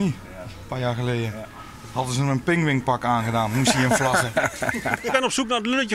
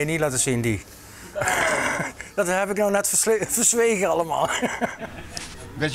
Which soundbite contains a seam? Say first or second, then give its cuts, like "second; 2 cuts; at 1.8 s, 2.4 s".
first; 1 cut; at 4.9 s